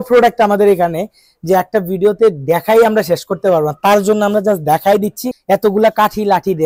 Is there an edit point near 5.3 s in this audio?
yes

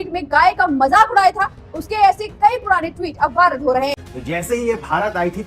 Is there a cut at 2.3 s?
no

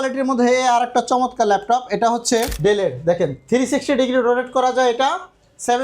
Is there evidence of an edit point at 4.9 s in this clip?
no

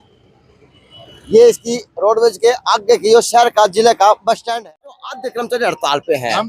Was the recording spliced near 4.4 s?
yes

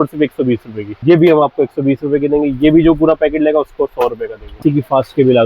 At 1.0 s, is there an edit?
yes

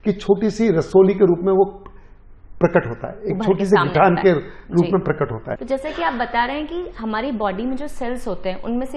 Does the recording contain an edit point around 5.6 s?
yes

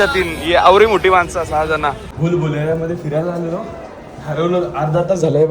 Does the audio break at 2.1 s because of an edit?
yes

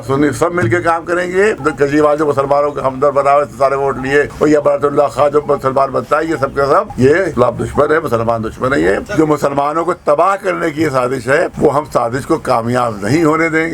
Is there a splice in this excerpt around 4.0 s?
no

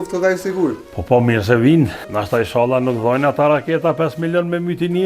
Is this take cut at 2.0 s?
yes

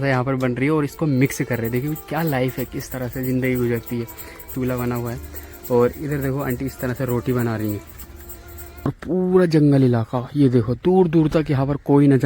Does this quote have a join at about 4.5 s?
yes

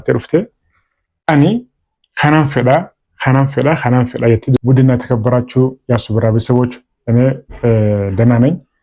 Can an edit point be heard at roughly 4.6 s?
yes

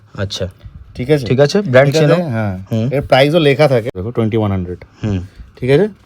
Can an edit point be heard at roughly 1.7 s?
no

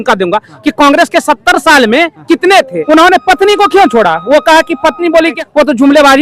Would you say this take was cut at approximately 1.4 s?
no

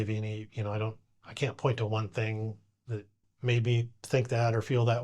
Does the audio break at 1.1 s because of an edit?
no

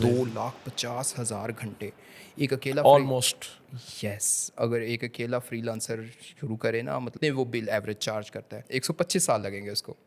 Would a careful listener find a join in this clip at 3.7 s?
no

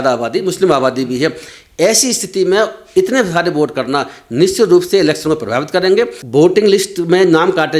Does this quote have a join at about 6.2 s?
yes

